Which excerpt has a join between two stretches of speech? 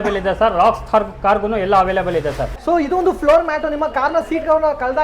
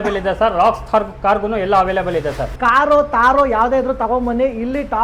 first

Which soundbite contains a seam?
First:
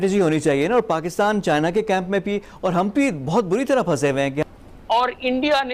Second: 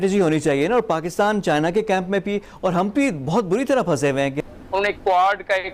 second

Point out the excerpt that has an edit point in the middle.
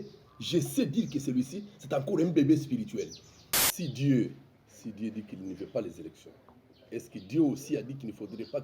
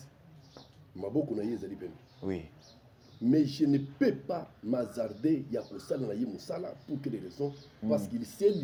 first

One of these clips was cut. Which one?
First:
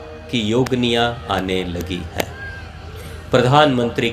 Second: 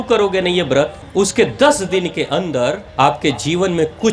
second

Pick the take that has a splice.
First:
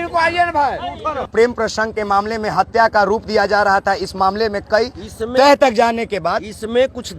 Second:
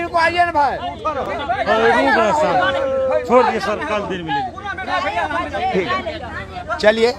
first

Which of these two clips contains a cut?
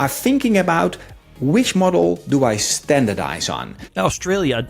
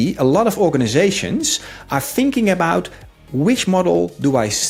first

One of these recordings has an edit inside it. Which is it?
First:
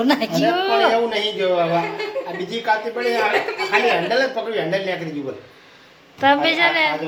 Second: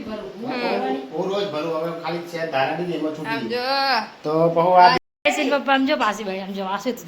second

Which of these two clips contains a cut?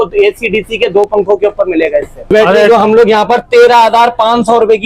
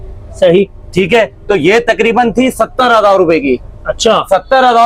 first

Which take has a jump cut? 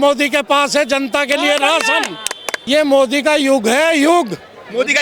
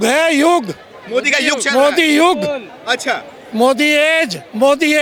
first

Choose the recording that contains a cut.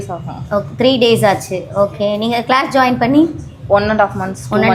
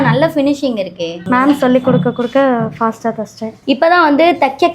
second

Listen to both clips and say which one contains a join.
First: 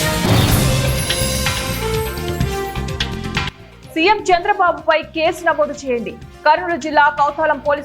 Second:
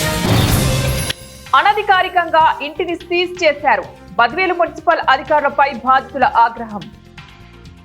first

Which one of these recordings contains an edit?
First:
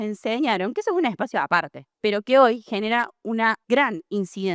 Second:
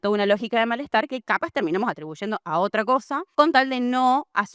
first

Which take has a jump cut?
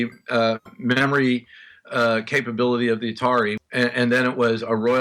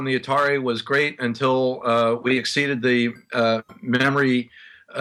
first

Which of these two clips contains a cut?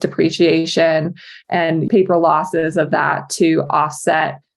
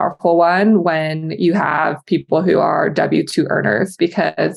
first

